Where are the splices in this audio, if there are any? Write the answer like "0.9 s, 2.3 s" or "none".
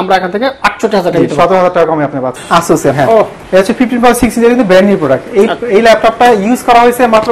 2.3 s, 3.4 s